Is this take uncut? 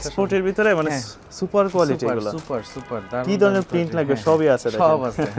yes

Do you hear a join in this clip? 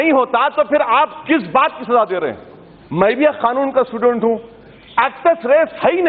no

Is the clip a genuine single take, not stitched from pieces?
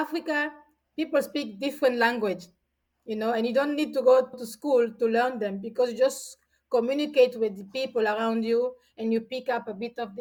yes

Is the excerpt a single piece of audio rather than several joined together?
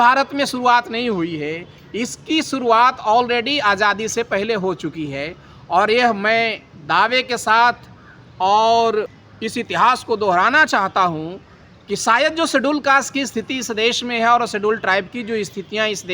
yes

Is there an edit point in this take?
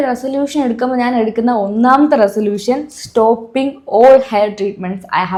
no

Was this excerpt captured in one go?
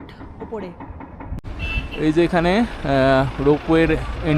no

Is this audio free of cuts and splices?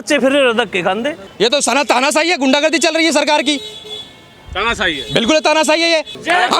no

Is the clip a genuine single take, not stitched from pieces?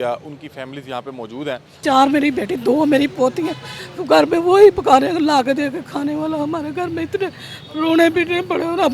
no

